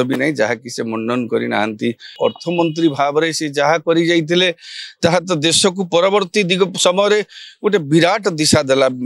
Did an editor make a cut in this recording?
yes; 1 cut; at 2.1 s

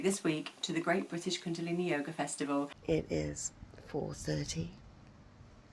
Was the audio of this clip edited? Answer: yes; 1 cut; at 2.8 s

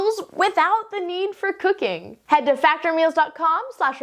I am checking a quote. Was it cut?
yes; 1 cut; at 2.1 s

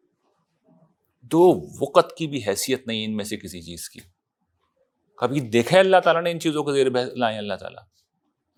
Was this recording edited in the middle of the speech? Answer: no; 0 cuts

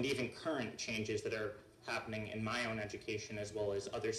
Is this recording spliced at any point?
no; 0 cuts

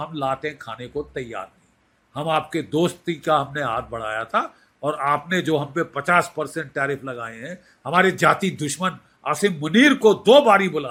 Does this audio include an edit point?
no; 0 cuts

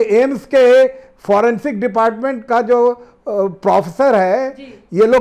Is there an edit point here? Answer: no; 0 cuts

